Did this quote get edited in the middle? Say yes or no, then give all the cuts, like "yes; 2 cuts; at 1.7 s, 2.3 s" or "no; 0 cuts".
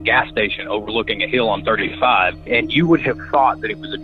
yes; 1 cut; at 2.5 s